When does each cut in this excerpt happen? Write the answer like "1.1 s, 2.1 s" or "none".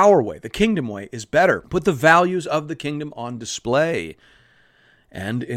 1.6 s